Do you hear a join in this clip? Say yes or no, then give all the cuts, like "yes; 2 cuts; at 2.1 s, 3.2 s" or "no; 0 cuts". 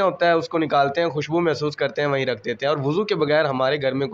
no; 0 cuts